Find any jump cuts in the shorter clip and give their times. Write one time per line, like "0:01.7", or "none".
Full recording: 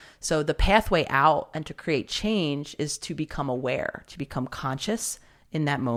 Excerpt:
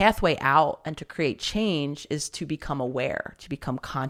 none

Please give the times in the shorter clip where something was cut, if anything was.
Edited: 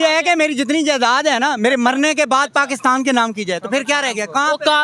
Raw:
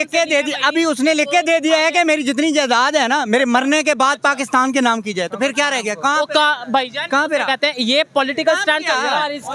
none

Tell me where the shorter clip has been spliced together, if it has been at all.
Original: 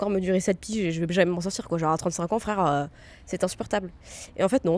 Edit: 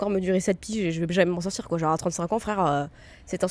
none

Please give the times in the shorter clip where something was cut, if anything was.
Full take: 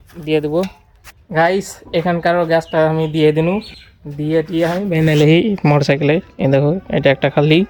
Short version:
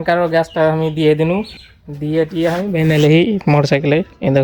none

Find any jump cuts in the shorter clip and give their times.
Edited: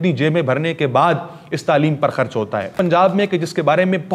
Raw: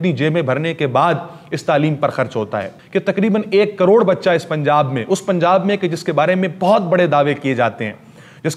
0:02.7

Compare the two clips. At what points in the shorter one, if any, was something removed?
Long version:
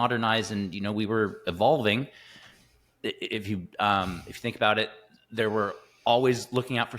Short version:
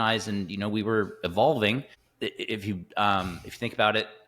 0:02.0

